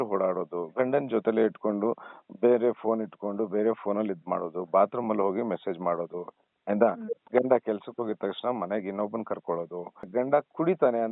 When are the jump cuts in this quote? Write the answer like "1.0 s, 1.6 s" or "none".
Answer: 10.1 s

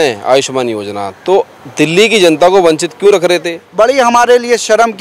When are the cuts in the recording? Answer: 3.6 s

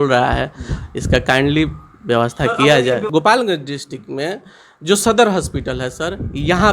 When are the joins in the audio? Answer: 3.1 s

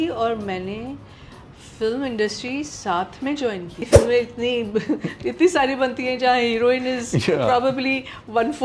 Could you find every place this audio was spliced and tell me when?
3.8 s

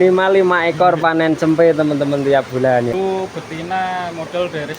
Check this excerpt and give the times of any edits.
2.9 s

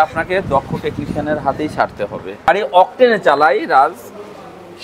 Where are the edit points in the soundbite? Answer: 2.5 s

